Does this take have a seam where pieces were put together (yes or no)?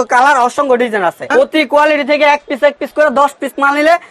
yes